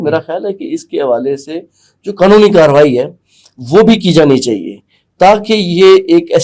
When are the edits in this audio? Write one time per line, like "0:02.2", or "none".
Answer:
none